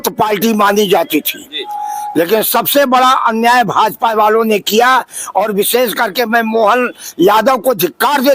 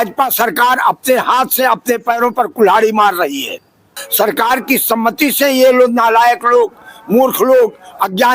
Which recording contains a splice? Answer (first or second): second